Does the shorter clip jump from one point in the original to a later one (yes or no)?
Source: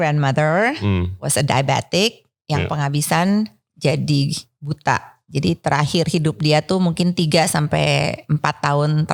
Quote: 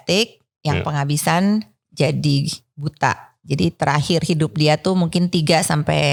no